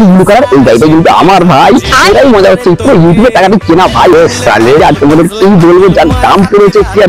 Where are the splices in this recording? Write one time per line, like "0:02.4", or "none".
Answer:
none